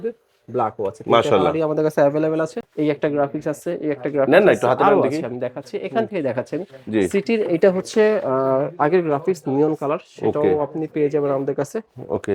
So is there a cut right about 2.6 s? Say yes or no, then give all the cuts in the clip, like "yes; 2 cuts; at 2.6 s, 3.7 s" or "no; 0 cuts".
yes; 1 cut; at 2.6 s